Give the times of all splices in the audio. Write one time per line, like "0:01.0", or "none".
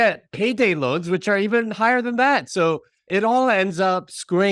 0:03.0